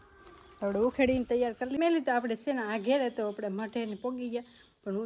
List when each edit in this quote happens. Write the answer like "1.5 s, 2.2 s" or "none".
1.7 s